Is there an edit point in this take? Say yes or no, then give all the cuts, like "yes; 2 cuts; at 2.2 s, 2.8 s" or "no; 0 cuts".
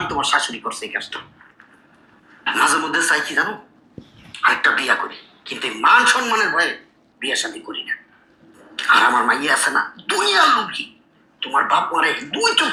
no; 0 cuts